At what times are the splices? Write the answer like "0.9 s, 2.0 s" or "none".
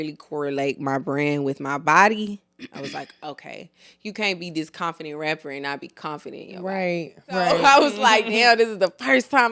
7.6 s